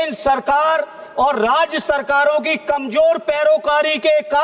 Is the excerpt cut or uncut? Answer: uncut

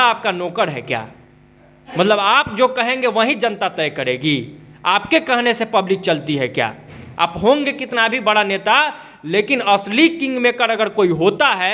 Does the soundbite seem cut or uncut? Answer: uncut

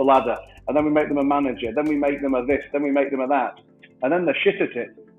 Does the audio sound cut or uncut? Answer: uncut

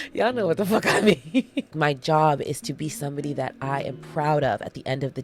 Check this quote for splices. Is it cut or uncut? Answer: cut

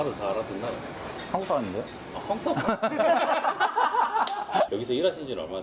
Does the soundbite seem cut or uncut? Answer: cut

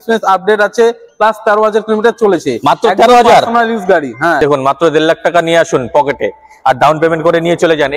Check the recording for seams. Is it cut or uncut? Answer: cut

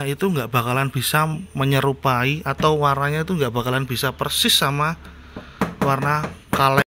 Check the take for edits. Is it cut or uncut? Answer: uncut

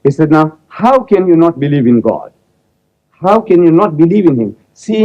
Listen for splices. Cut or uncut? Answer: uncut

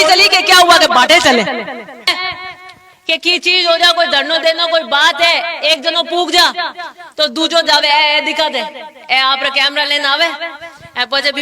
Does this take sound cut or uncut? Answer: cut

